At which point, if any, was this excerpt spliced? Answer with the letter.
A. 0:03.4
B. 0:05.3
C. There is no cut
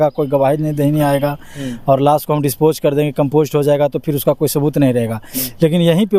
C